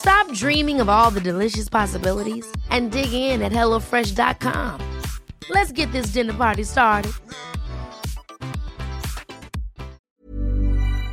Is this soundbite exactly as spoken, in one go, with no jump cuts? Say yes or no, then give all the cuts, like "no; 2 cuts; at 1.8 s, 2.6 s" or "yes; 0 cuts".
no; 1 cut; at 10.0 s